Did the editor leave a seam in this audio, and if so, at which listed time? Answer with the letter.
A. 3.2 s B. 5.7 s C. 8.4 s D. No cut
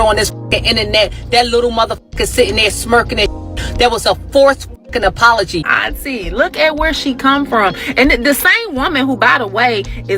B